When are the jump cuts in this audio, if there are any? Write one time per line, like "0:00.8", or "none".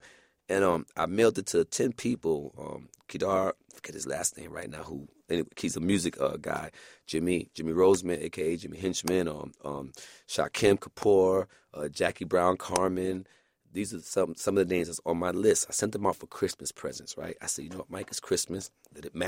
none